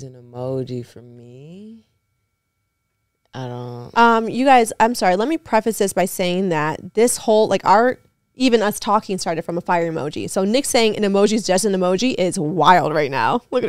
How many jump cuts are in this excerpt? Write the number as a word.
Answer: zero